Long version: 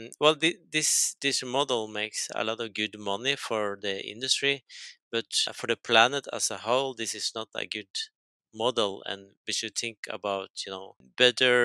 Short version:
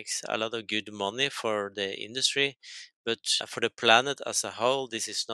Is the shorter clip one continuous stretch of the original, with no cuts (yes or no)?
yes